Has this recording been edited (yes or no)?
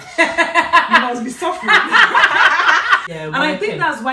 yes